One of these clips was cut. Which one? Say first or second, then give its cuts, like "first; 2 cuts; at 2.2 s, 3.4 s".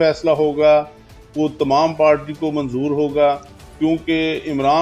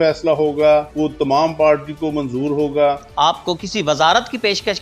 second; 2 cuts; at 0.9 s, 3.1 s